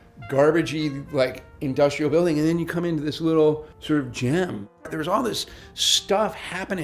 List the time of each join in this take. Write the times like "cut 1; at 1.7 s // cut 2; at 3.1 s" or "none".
cut 1; at 3.7 s // cut 2; at 4.9 s

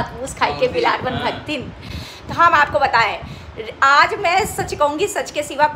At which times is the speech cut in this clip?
none

